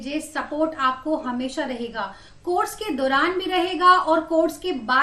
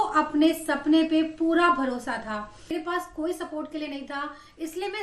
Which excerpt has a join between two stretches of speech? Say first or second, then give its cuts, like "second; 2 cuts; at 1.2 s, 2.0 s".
second; 1 cut; at 2.8 s